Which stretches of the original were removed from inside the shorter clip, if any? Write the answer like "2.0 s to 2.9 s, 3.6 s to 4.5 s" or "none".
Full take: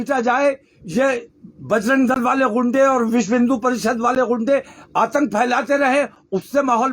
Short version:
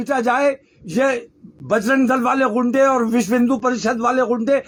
none